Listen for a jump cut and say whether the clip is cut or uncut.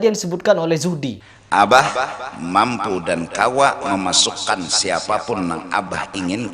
cut